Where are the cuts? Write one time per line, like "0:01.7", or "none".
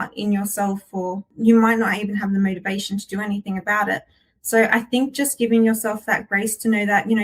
0:01.2